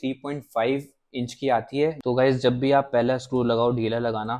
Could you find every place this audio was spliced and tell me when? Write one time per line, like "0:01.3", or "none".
0:02.0